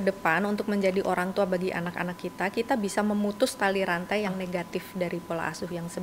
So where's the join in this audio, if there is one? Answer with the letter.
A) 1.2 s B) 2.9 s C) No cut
C